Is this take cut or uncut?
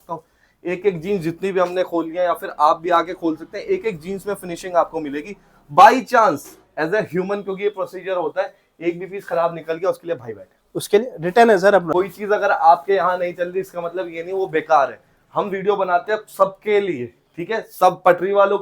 cut